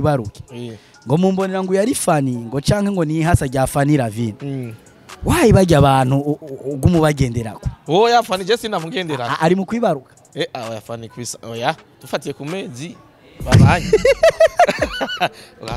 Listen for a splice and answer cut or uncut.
uncut